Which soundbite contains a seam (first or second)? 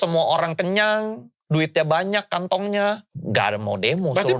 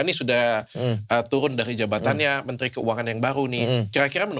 first